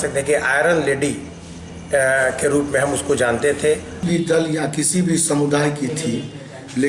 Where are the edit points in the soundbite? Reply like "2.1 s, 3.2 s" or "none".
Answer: 4.0 s